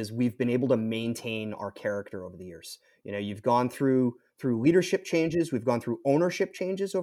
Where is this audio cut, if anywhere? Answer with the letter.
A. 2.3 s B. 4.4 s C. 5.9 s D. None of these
D